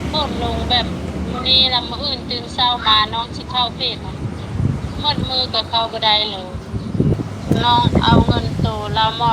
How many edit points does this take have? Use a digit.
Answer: 1